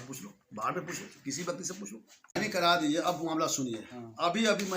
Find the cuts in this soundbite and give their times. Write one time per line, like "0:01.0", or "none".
0:02.5